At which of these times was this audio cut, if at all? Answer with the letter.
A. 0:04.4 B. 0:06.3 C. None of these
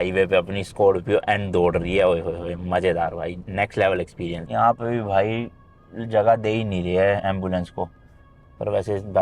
C